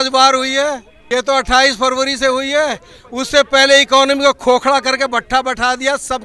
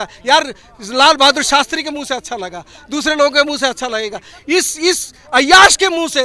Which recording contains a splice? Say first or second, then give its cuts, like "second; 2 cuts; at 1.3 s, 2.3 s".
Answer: first; 1 cut; at 0.9 s